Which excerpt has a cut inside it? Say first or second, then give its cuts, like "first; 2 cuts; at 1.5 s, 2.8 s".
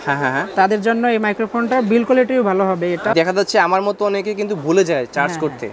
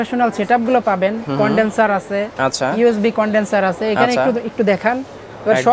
first; 1 cut; at 3.1 s